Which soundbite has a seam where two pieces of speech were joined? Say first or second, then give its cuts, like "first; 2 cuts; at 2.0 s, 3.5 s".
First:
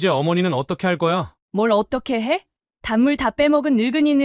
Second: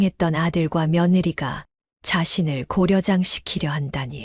first; 1 cut; at 1.4 s